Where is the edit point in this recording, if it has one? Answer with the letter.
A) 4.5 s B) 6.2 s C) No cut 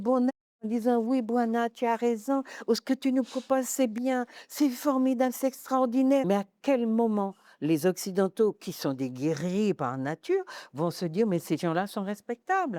B